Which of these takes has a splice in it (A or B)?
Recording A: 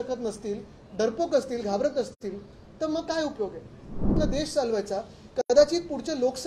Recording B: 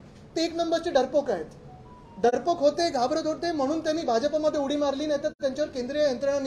A